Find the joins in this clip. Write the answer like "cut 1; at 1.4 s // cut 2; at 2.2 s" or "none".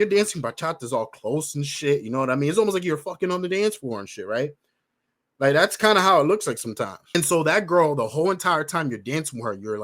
cut 1; at 7.0 s